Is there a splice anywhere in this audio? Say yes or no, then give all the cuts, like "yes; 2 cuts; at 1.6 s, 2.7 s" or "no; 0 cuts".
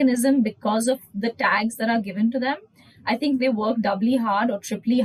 no; 0 cuts